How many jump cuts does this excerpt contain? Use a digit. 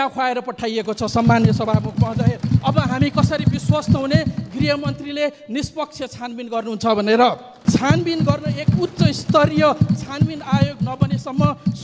1